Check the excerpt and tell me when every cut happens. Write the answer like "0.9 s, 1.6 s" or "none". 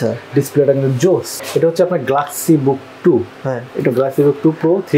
1.3 s